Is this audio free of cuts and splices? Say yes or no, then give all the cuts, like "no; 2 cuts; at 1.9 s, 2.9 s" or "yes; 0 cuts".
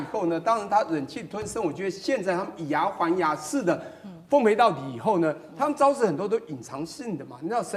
yes; 0 cuts